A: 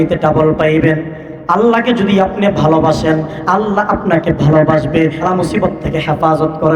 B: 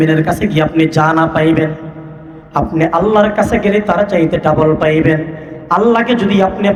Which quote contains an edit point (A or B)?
A